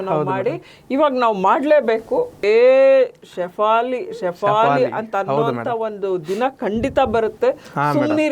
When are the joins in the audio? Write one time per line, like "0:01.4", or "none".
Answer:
0:02.4